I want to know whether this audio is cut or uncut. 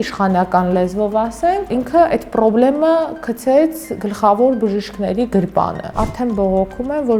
cut